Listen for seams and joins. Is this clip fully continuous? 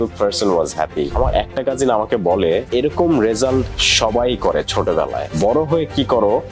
no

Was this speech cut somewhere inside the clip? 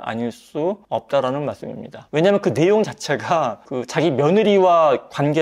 yes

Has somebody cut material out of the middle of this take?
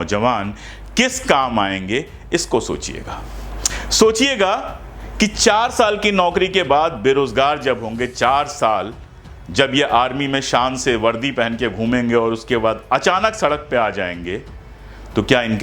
no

